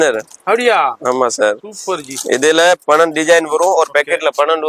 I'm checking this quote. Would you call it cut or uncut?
uncut